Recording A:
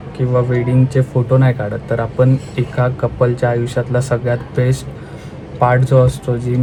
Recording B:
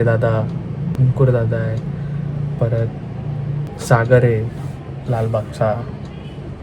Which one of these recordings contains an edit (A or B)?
B